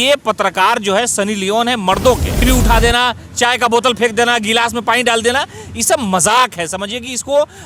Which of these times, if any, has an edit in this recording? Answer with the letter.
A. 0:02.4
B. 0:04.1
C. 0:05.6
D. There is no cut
A